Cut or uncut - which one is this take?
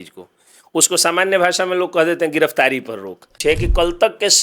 cut